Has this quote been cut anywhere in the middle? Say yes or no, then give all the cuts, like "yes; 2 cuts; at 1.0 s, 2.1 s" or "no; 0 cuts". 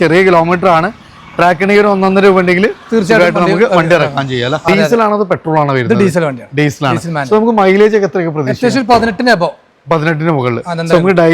yes; 1 cut; at 4.6 s